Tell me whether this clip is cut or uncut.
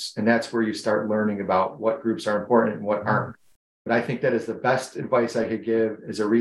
uncut